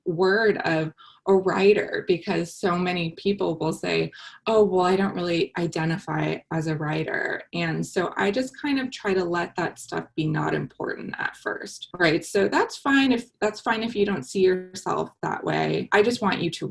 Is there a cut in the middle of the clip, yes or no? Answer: yes